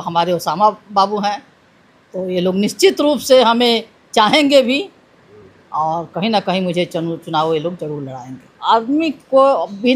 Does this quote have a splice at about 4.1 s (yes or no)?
no